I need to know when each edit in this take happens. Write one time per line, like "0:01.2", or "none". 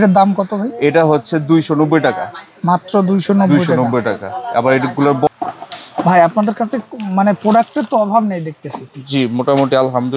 0:05.3